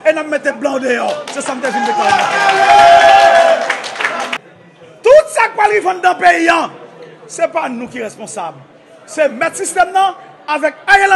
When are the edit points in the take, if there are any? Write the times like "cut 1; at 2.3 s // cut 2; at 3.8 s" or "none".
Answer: cut 1; at 4.4 s